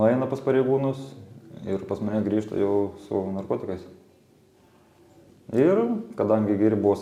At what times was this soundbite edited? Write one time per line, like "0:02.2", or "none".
none